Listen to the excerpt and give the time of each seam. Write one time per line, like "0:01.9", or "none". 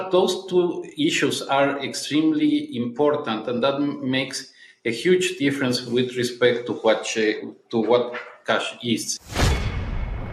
0:09.2